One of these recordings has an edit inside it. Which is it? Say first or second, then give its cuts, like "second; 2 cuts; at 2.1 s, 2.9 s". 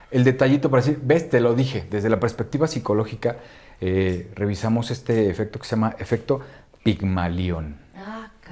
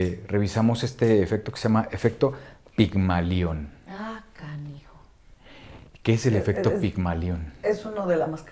first; 1 cut; at 1.8 s